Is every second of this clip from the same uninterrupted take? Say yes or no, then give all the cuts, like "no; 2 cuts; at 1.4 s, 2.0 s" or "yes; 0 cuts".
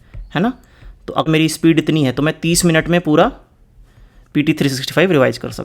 no; 1 cut; at 1.3 s